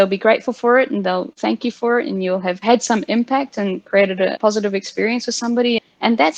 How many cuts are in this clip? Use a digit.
0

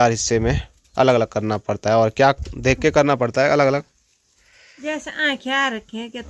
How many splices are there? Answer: 0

